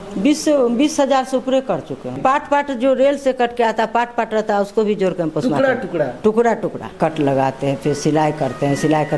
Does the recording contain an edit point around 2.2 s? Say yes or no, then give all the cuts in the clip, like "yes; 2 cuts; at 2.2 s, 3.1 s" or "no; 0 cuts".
yes; 2 cuts; at 2.2 s, 7.0 s